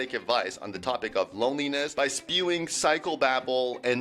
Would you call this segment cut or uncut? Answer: cut